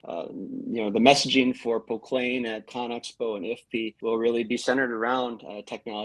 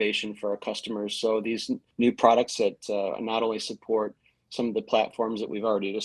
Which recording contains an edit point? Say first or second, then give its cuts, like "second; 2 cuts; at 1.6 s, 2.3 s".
first; 1 cut; at 4.0 s